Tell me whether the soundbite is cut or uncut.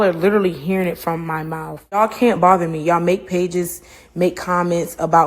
cut